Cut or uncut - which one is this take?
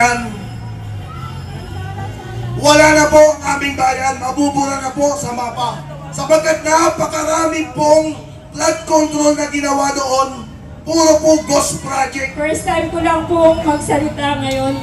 cut